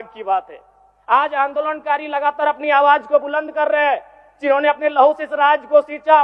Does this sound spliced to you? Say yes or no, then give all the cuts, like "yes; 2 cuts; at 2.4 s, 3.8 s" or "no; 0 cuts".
no; 0 cuts